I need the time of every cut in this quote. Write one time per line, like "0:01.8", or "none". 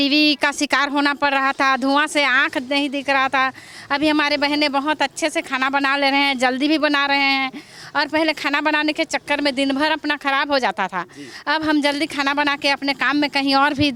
none